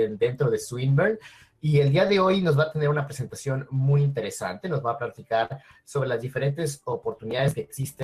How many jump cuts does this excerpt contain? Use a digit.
0